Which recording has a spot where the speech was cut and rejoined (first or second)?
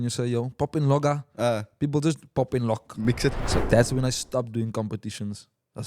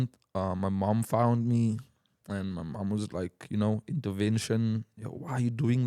first